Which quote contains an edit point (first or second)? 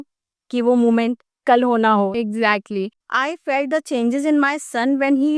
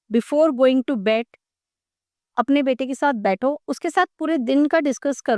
first